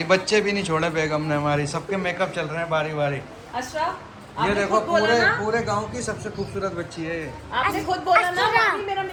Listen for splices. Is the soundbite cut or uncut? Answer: uncut